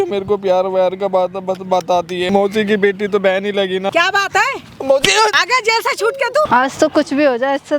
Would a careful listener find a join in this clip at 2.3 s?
yes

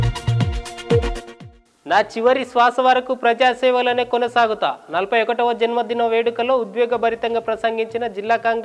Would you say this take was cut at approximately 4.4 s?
no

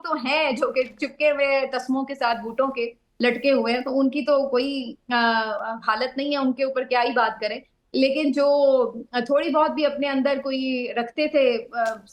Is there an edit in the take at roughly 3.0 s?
no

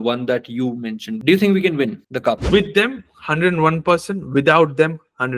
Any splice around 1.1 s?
yes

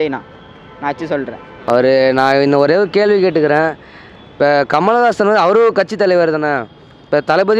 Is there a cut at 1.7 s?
yes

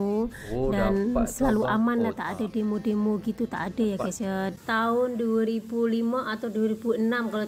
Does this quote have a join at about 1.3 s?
no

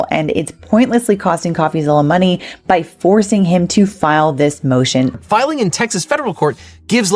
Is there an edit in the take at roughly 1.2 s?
no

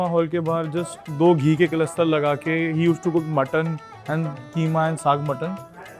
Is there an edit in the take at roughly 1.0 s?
yes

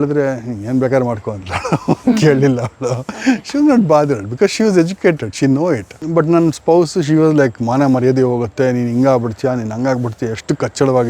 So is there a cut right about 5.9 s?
yes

